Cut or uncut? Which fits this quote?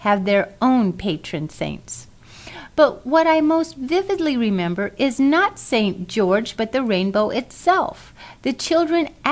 cut